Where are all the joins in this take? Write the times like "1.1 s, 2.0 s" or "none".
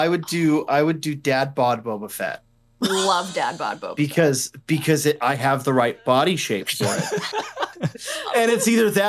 7.7 s